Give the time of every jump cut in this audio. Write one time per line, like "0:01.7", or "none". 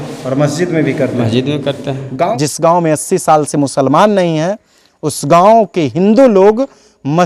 0:02.3